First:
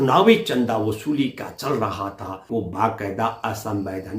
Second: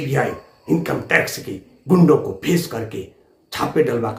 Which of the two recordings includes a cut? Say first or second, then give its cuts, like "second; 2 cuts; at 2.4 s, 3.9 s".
first; 1 cut; at 2.4 s